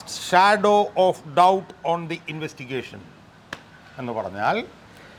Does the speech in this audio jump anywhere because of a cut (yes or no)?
no